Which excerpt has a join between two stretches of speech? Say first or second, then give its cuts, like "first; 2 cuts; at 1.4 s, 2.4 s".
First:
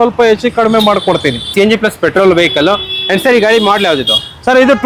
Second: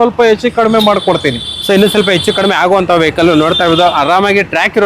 first; 1 cut; at 1.5 s